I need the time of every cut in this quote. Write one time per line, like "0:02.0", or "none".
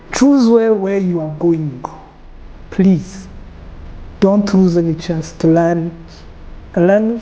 0:02.6
0:05.3

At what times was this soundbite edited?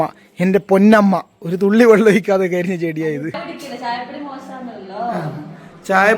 0:03.3

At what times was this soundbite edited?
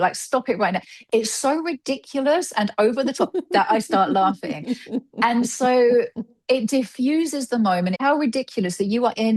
0:08.0

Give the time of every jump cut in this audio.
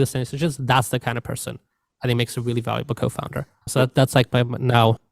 0:03.7

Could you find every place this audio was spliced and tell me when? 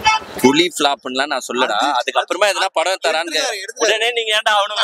none

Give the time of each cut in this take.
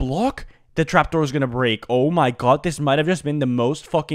none

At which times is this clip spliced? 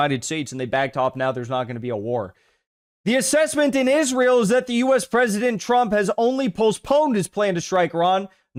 none

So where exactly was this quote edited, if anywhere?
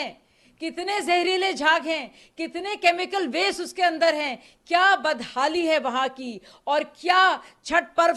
none

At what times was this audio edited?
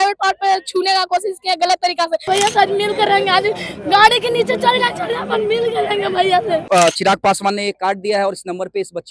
0:02.2
0:06.6

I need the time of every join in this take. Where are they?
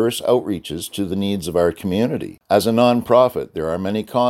0:02.3

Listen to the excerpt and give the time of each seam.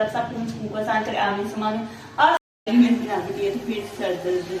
0:02.5

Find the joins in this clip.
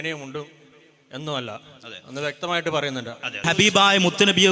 0:03.5

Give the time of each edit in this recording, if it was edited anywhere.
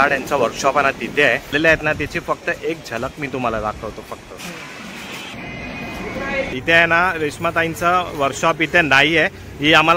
0:01.5
0:05.3
0:06.6

